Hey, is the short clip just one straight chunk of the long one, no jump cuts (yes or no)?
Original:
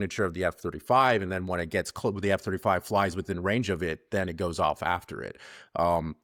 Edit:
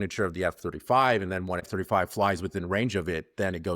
no